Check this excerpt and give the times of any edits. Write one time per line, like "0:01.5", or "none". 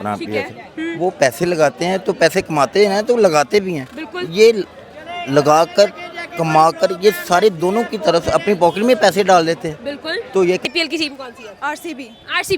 0:10.6